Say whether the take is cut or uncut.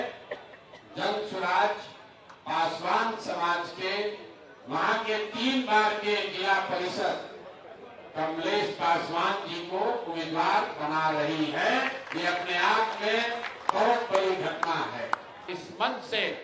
cut